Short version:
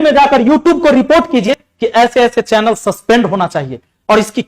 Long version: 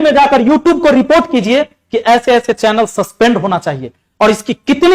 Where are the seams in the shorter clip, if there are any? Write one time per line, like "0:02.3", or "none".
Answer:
0:01.5